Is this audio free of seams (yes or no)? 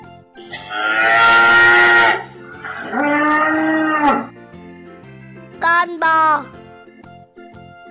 yes